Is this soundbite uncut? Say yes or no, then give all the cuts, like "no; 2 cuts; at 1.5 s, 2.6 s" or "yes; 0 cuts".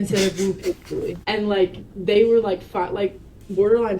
no; 1 cut; at 1.2 s